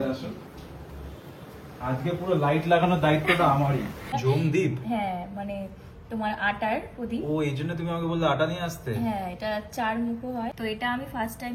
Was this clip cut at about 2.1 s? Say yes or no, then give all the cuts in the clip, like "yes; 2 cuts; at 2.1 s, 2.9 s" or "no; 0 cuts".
no; 2 cuts; at 4.0 s, 10.5 s